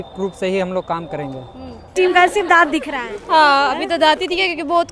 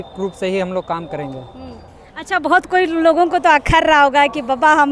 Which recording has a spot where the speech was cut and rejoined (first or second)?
first